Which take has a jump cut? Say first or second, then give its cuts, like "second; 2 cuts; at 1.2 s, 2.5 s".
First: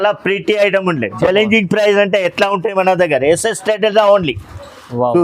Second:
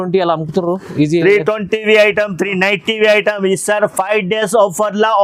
first; 1 cut; at 1.1 s